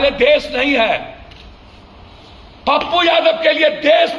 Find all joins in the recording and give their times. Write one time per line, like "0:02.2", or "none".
none

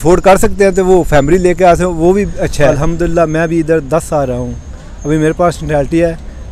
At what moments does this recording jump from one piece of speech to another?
0:02.8

